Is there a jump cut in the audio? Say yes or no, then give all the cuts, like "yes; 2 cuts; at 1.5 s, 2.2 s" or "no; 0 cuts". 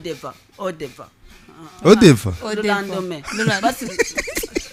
no; 0 cuts